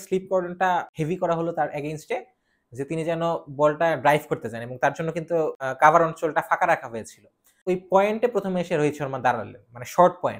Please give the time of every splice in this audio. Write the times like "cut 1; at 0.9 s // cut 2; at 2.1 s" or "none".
cut 1; at 0.9 s // cut 2; at 5.6 s // cut 3; at 7.6 s